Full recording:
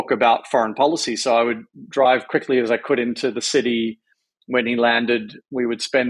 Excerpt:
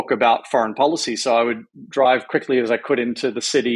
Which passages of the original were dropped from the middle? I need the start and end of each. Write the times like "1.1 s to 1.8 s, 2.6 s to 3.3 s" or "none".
none